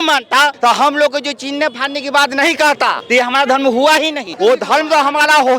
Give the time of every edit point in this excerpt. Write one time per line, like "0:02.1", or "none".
0:03.0
0:04.3